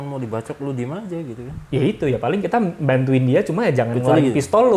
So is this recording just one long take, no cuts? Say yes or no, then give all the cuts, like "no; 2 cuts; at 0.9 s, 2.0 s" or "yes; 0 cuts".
yes; 0 cuts